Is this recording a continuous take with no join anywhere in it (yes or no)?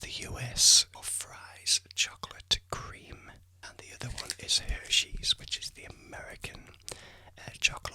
no